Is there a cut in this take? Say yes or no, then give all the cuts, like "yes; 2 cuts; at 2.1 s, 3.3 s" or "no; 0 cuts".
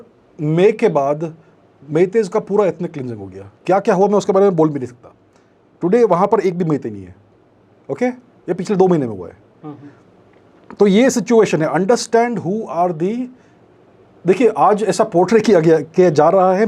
no; 0 cuts